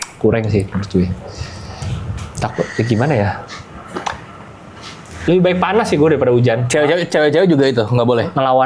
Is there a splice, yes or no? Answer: no